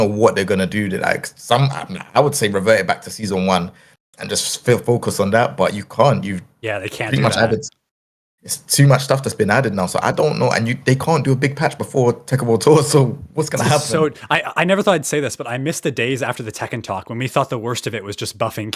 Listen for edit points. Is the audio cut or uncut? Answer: cut